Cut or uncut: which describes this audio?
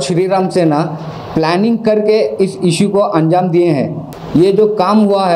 uncut